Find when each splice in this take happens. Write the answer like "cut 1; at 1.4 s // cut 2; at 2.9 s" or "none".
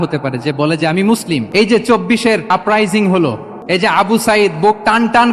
cut 1; at 1.5 s // cut 2; at 2.5 s // cut 3; at 3.5 s